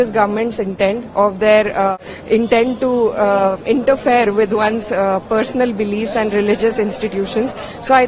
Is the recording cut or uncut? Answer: cut